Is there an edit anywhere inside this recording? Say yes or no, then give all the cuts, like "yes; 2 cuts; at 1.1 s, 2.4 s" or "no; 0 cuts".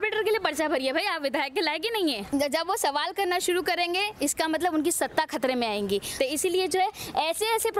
yes; 2 cuts; at 2.2 s, 6.1 s